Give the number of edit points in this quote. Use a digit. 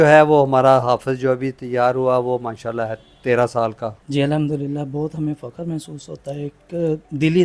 1